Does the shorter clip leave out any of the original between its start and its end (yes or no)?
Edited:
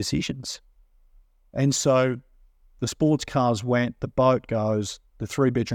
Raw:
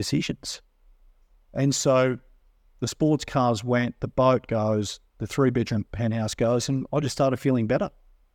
no